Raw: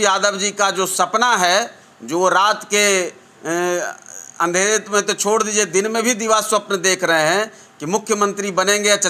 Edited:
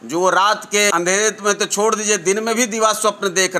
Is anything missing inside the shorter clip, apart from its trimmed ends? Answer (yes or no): yes